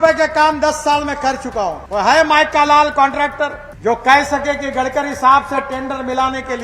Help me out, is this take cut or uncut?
cut